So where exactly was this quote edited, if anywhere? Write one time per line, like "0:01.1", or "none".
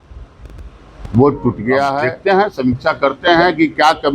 0:02.1